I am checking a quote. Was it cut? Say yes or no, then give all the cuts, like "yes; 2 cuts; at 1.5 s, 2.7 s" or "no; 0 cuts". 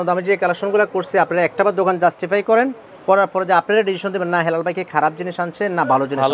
no; 0 cuts